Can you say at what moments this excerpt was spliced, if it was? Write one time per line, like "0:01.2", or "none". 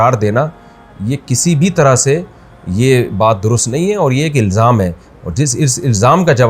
none

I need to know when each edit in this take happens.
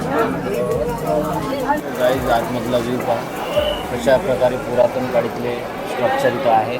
0:01.8

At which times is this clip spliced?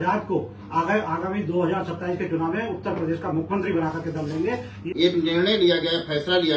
0:04.7

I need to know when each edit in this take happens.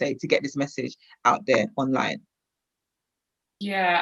none

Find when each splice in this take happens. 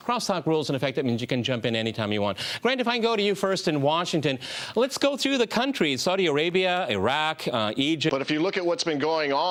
none

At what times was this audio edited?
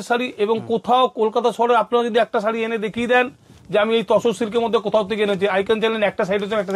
none

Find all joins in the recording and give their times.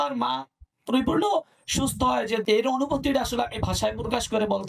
0:02.4

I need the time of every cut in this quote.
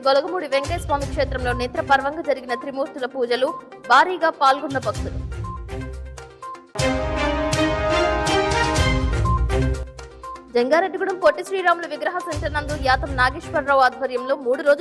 none

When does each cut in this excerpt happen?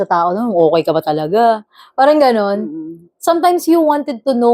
none

